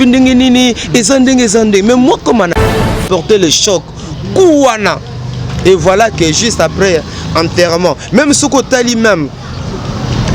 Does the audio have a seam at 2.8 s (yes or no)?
yes